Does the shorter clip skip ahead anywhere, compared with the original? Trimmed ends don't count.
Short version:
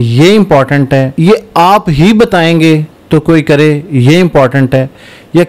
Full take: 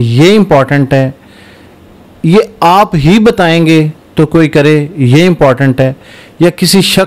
yes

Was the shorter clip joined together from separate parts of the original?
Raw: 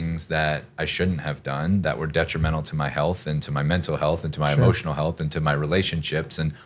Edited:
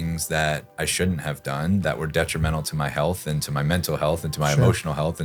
no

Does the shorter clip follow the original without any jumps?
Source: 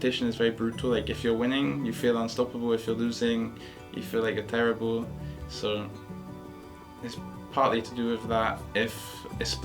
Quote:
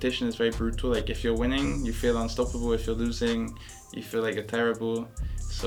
yes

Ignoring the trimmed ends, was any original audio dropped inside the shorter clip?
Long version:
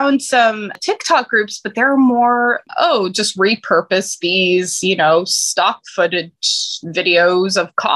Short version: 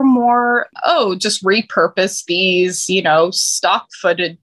no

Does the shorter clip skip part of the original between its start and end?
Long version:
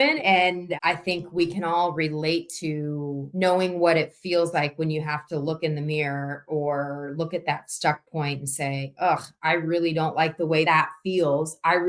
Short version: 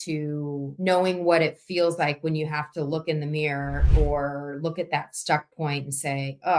no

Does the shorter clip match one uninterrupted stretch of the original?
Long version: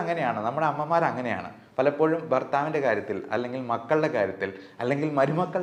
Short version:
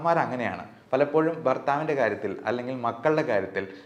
yes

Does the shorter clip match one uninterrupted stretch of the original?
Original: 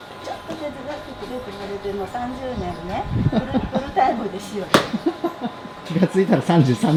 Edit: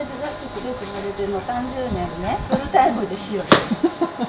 no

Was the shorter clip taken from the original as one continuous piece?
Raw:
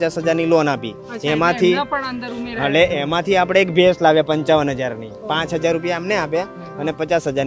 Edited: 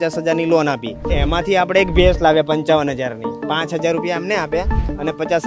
no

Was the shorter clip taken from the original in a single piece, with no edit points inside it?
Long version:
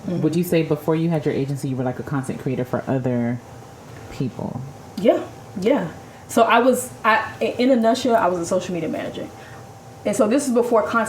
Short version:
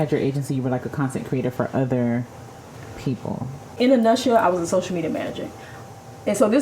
no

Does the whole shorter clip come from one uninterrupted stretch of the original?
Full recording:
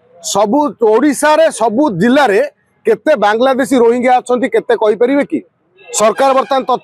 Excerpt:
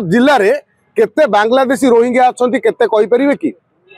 yes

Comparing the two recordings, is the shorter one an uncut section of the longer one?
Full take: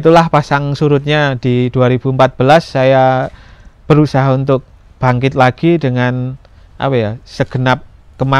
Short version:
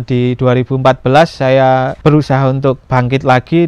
no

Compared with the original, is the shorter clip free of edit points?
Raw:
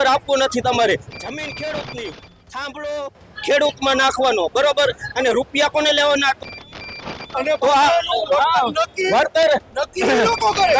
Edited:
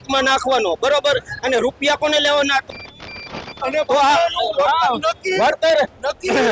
yes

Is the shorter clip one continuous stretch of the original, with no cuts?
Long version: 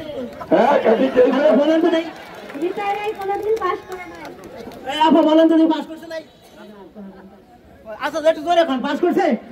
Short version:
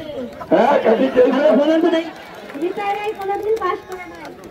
yes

